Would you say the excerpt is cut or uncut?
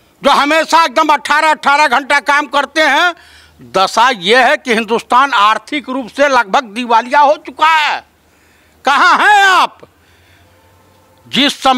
uncut